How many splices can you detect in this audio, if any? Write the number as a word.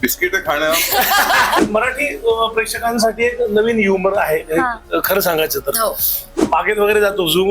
two